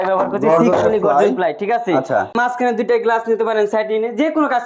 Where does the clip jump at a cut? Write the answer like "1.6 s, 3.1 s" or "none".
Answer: 2.3 s